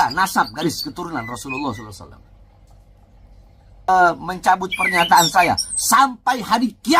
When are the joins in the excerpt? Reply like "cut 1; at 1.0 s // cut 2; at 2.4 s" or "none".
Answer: cut 1; at 3.9 s